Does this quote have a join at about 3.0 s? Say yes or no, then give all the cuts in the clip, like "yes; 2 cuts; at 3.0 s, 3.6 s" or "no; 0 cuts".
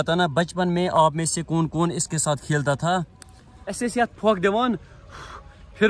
no; 0 cuts